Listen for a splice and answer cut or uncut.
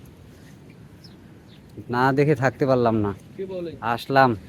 uncut